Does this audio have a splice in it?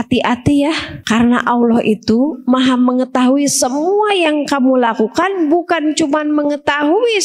yes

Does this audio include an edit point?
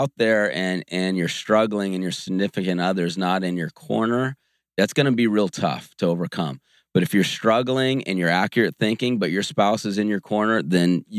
no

